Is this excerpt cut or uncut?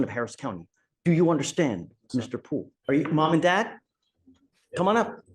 cut